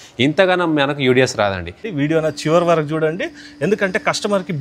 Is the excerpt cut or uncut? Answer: cut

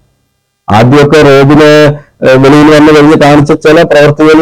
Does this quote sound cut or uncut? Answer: uncut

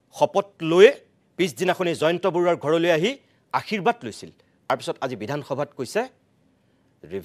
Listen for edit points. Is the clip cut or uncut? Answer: cut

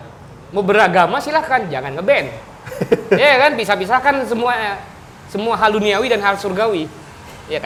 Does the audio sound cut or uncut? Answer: uncut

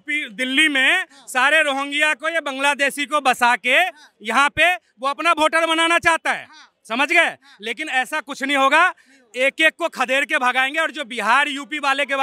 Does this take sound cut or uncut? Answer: uncut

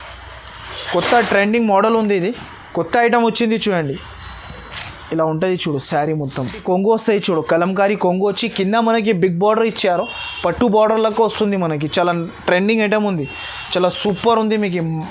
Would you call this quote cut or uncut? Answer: cut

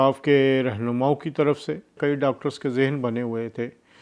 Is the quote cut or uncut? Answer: cut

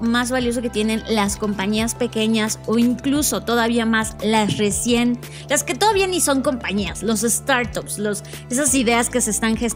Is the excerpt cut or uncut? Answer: uncut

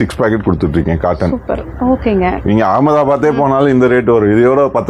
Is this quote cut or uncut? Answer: uncut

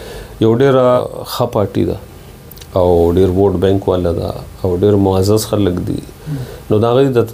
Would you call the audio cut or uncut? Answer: cut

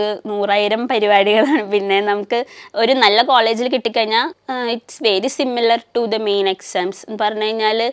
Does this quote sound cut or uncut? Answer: cut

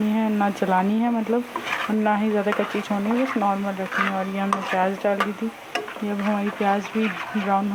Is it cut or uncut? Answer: uncut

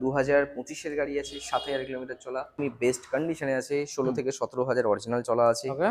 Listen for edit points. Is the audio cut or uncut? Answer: cut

